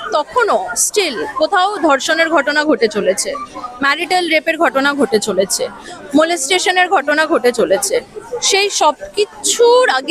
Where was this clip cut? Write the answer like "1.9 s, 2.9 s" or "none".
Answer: none